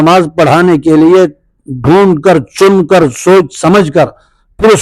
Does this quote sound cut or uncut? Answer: uncut